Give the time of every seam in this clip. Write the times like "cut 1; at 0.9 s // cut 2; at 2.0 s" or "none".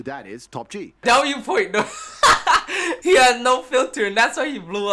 cut 1; at 1.0 s // cut 2; at 2.9 s

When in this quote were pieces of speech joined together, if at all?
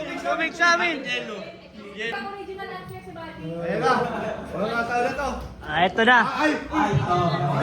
cut 1; at 2.1 s

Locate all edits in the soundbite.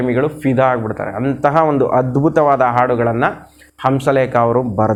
none

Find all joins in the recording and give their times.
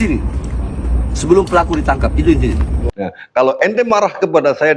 cut 1; at 2.8 s

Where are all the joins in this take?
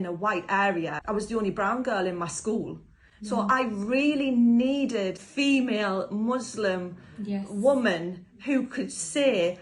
cut 1; at 1.0 s // cut 2; at 5.2 s

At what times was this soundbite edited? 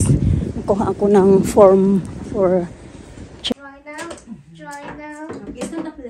cut 1; at 3.5 s

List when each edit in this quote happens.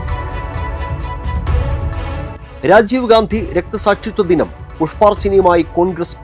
cut 1; at 2.4 s

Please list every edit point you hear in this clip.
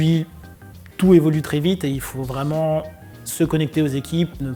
none

